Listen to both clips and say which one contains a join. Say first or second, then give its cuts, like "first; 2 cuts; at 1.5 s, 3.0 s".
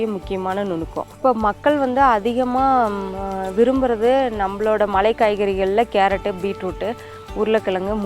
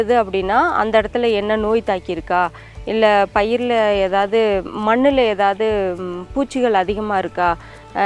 first; 1 cut; at 1.0 s